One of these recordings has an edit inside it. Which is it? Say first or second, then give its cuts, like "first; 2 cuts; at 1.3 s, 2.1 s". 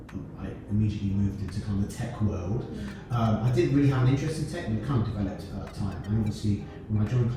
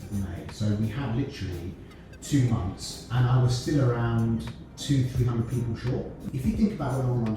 second; 1 cut; at 6.2 s